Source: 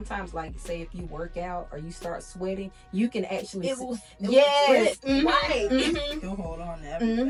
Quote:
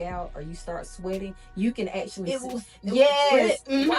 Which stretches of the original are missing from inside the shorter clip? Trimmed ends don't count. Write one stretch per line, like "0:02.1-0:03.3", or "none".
none